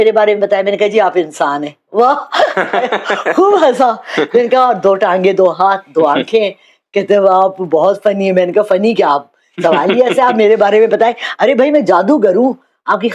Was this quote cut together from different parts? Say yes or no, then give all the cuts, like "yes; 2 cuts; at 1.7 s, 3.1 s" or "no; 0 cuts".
no; 0 cuts